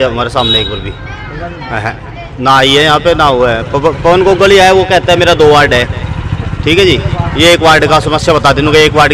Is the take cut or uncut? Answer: uncut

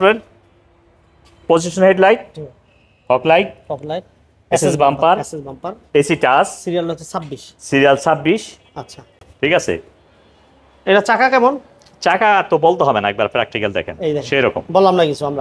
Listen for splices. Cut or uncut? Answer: uncut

